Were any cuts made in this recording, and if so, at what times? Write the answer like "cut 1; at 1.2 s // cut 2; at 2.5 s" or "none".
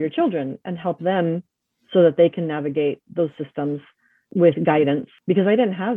cut 1; at 4.2 s // cut 2; at 5.1 s